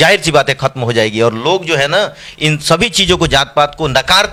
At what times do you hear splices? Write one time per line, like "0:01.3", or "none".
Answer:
none